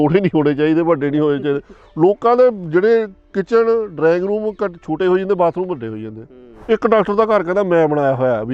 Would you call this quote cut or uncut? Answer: cut